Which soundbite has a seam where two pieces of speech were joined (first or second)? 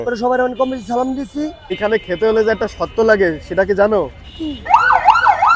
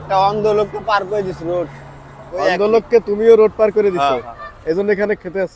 first